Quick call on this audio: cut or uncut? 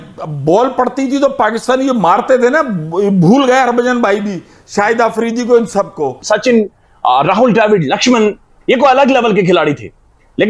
cut